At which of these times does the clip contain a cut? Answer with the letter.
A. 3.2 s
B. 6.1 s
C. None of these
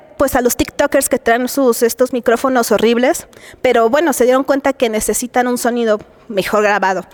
C